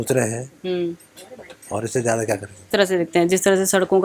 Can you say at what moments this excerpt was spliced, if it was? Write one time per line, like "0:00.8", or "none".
0:02.6

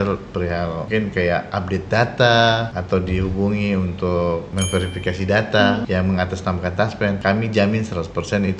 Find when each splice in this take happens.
0:00.9
0:02.7
0:04.5
0:05.8
0:07.2

